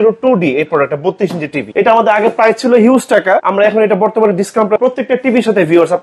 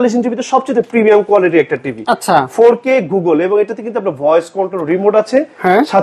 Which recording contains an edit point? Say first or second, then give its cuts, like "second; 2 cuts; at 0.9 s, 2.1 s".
first; 3 cuts; at 1.7 s, 3.5 s, 4.8 s